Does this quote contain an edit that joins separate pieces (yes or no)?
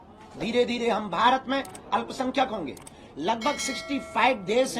no